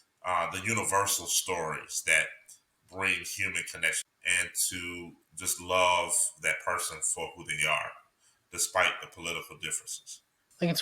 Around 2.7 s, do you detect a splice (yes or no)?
no